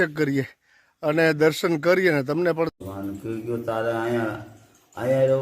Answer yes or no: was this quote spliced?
yes